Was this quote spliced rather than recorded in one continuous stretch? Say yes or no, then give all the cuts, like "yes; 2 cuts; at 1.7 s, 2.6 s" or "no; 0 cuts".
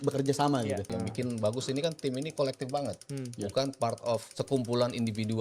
yes; 2 cuts; at 0.9 s, 4.3 s